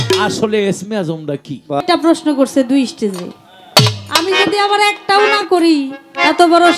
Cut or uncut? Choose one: cut